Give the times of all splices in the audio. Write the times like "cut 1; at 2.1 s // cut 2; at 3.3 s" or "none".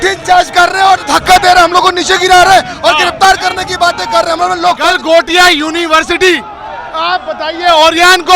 cut 1; at 4.8 s